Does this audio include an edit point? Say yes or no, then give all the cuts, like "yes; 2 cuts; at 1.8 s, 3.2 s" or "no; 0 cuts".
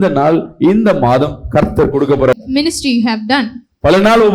no; 0 cuts